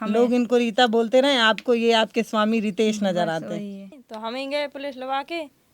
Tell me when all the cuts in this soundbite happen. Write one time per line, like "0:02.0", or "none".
0:04.0